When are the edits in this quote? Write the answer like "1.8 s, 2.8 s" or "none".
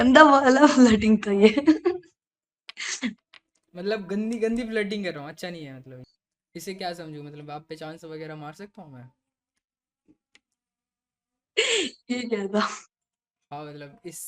5.9 s